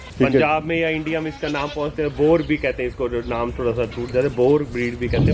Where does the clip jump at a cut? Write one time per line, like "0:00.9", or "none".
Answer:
none